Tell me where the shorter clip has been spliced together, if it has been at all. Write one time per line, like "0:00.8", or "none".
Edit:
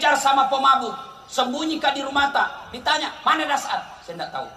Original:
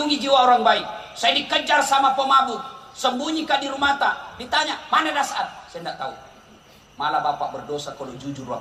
none